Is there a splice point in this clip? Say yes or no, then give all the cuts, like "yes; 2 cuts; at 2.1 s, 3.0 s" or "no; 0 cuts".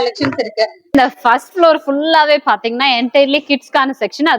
yes; 1 cut; at 0.9 s